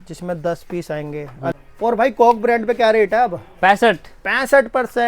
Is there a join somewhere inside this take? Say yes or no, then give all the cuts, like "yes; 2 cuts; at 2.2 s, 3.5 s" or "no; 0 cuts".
yes; 1 cut; at 1.5 s